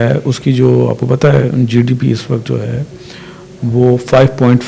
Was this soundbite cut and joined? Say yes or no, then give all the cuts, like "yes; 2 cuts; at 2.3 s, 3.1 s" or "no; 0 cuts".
no; 0 cuts